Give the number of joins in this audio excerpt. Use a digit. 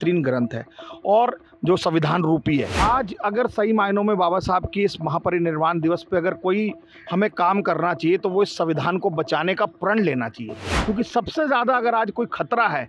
1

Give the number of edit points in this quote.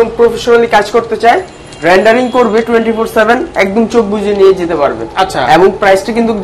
0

